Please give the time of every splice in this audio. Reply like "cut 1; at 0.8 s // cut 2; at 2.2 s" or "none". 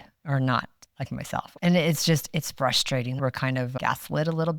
cut 1; at 1.5 s // cut 2; at 3.2 s